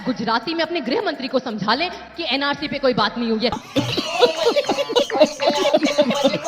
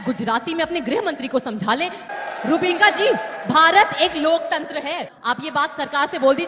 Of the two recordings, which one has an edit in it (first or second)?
second